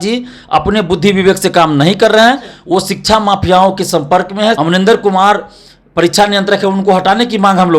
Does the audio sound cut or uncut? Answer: cut